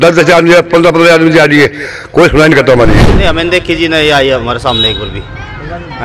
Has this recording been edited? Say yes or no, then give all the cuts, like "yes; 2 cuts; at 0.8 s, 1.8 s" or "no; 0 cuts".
yes; 1 cut; at 3.1 s